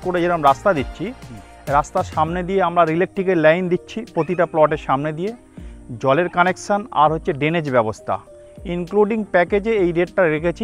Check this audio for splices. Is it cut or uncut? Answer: uncut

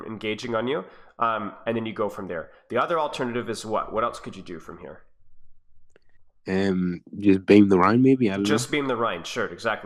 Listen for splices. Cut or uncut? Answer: uncut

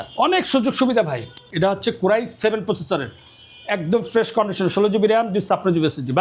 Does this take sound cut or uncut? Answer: cut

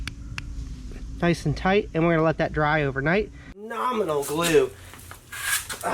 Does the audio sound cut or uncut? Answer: cut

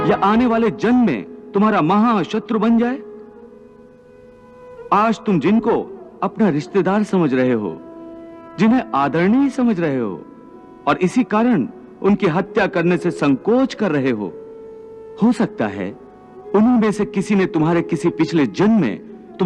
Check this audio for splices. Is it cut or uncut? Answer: uncut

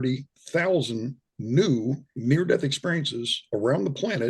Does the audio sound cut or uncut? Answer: uncut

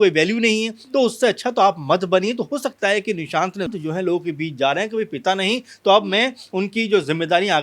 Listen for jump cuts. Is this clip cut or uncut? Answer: cut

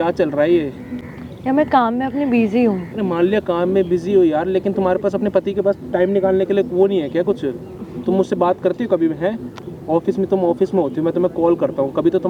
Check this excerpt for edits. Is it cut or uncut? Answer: uncut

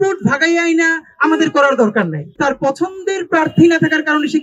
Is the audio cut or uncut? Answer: cut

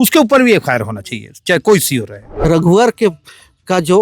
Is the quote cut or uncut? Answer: cut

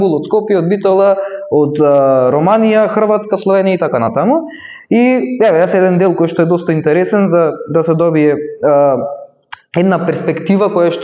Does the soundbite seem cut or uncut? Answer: uncut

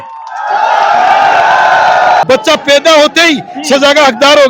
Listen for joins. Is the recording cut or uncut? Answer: cut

